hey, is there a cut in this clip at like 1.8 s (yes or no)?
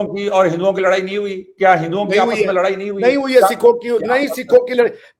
no